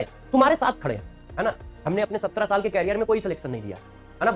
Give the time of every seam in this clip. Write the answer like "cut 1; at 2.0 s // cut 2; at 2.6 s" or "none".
cut 1; at 1.2 s